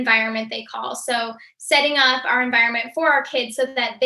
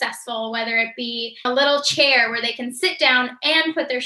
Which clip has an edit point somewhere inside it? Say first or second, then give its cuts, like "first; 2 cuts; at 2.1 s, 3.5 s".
second; 1 cut; at 1.4 s